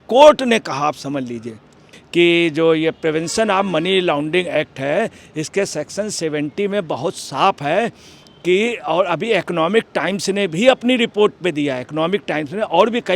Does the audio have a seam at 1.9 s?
yes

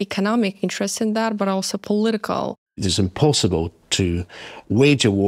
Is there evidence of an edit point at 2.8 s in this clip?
yes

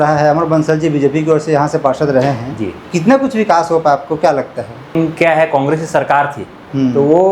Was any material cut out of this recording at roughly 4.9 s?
yes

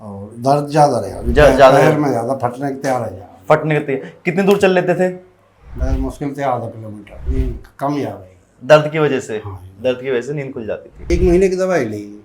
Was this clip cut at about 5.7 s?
no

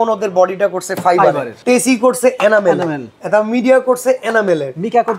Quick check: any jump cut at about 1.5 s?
yes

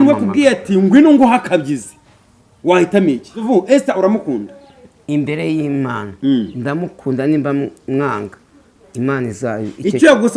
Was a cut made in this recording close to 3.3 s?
yes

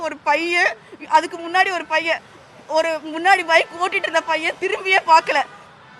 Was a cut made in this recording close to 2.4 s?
no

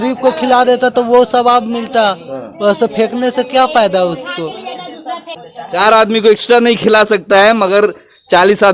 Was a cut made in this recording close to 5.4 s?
yes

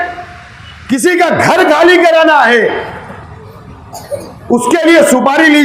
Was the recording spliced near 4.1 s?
no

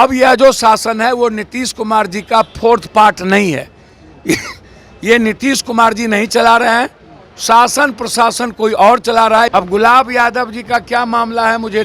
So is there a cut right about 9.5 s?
yes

